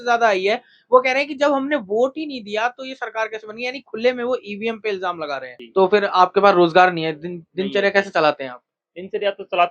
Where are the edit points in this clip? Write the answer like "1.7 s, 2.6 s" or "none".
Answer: 5.5 s